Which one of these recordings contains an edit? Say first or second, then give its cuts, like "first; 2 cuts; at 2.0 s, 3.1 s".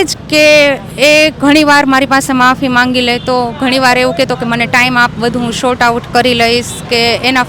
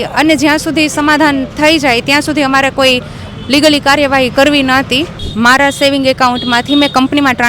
second; 1 cut; at 5.1 s